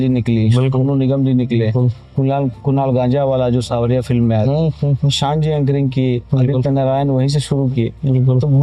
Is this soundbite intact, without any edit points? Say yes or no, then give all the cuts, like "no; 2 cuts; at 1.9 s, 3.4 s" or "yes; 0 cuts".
yes; 0 cuts